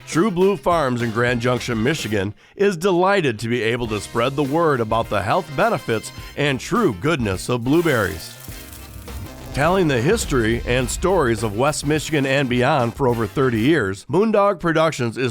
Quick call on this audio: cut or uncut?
cut